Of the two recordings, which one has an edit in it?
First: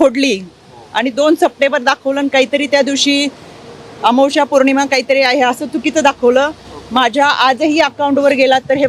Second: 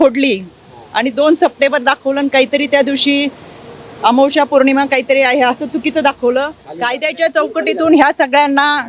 second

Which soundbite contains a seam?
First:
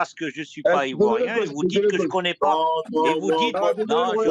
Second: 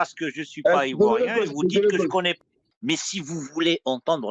second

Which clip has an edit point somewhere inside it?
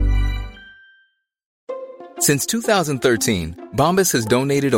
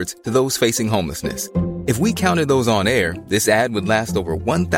first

